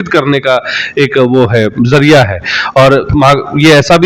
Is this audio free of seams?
yes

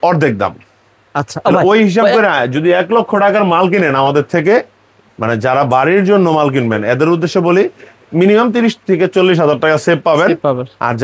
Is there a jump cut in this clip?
no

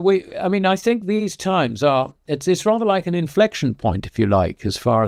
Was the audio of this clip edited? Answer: no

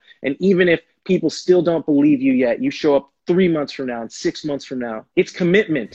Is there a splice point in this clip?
yes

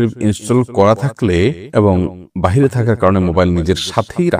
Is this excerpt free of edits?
no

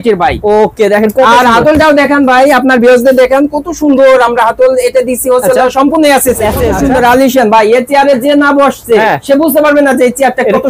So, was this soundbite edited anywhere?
yes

